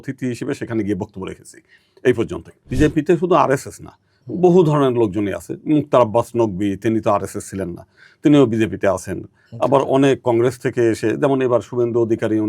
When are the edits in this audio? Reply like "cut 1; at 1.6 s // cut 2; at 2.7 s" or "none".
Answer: cut 1; at 2.7 s